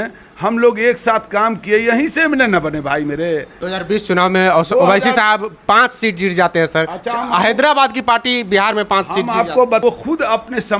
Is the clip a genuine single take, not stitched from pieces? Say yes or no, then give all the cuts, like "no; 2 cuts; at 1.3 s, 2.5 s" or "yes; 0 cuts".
no; 2 cuts; at 3.6 s, 9.8 s